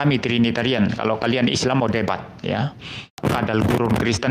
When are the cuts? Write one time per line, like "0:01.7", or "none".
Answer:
0:03.1